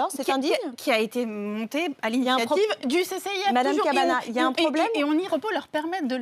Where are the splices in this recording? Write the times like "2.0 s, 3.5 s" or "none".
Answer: 5.1 s